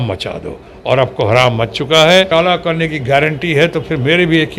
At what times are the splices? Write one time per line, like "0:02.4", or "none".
0:02.3